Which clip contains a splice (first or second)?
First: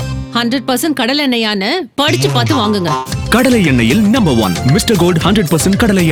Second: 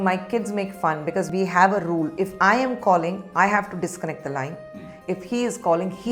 second